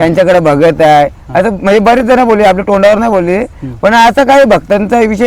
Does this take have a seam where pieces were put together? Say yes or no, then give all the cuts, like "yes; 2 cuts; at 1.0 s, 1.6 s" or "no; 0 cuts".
no; 0 cuts